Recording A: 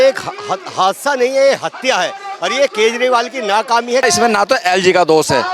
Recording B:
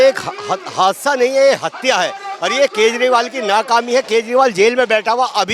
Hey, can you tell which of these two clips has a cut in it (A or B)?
A